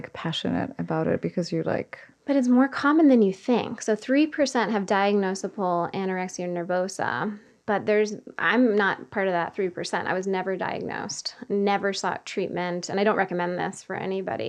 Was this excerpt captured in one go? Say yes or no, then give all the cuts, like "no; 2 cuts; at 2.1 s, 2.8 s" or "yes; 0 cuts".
yes; 0 cuts